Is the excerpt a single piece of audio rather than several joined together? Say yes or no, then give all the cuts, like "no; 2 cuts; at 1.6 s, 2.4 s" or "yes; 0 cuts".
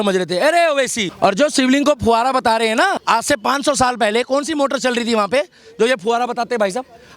no; 2 cuts; at 1.0 s, 3.0 s